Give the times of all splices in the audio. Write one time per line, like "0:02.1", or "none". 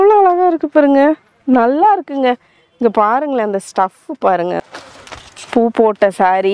0:04.6